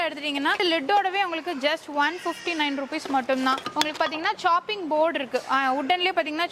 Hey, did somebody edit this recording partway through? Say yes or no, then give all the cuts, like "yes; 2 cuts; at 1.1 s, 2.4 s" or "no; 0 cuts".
no; 0 cuts